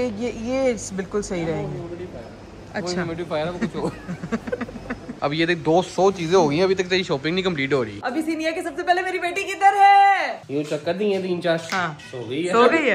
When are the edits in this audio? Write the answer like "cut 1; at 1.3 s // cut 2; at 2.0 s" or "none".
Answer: cut 1; at 5.2 s // cut 2; at 8.0 s // cut 3; at 10.4 s